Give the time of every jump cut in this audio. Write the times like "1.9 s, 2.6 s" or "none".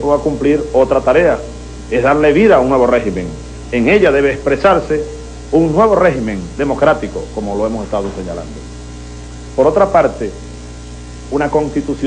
none